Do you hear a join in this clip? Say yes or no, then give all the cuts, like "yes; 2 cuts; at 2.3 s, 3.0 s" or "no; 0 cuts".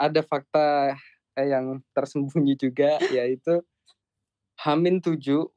no; 0 cuts